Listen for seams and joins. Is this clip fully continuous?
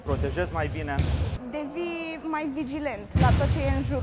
no; 1 cut; at 1.4 s

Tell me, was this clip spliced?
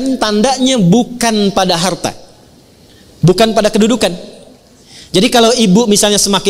no; 0 cuts

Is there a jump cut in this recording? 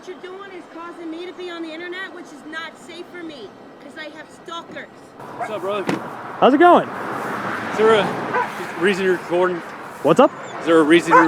yes; 1 cut; at 5.2 s

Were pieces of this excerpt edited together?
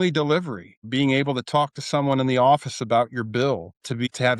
no; 0 cuts

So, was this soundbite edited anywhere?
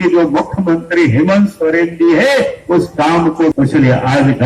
yes; 1 cut; at 3.5 s

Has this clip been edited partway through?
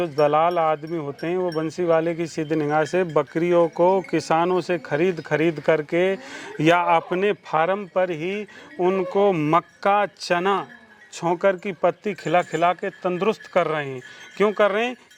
no; 0 cuts

